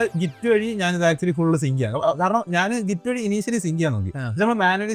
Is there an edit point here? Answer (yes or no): no